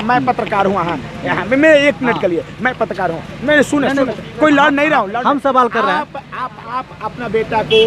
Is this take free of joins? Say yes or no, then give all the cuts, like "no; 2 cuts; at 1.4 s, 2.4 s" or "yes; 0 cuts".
yes; 0 cuts